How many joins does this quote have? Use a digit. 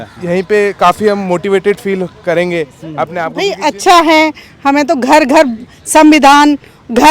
1